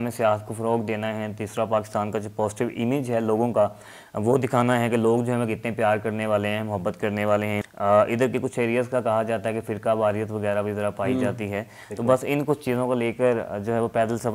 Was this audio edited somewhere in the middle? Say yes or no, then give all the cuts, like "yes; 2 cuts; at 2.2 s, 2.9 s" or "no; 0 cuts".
yes; 1 cut; at 7.7 s